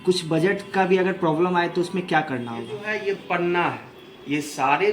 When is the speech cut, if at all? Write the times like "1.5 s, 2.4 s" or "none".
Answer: 2.8 s

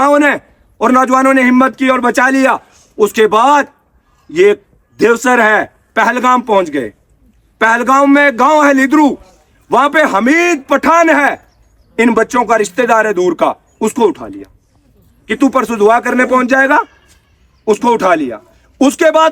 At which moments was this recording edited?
none

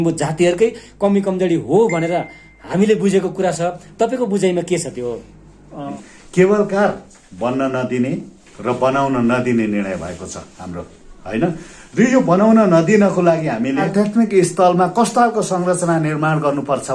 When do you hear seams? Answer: 6.0 s, 13.9 s

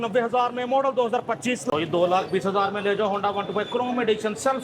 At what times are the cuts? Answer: 1.6 s

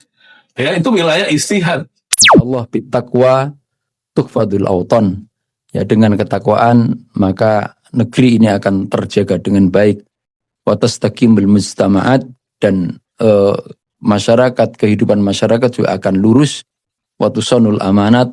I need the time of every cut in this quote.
2.4 s

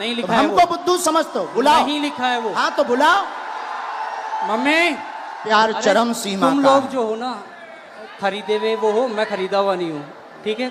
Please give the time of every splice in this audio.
5.4 s

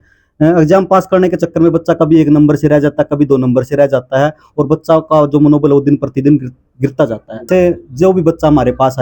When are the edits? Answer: 7.5 s

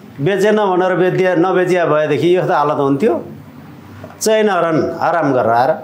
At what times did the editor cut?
none

